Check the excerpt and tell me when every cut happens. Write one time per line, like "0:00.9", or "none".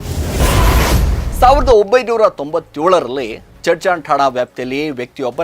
0:01.2